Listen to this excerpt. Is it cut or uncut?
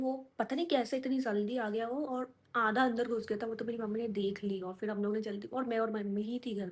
uncut